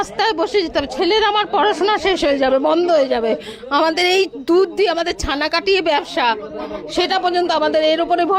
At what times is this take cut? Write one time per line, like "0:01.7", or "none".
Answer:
none